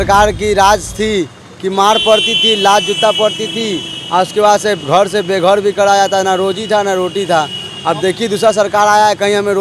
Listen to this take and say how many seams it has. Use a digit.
0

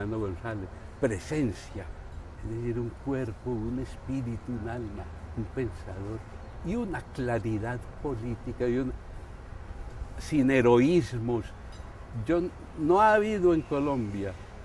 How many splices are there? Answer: 0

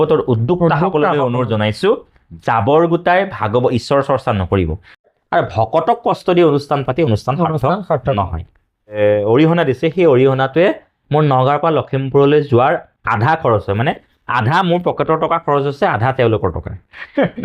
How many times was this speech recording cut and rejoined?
2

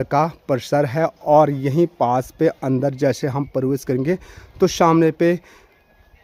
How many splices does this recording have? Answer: 0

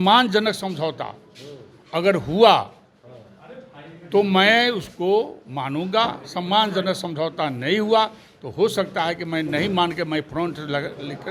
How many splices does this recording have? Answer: 0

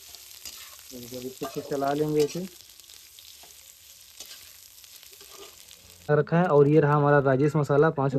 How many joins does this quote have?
1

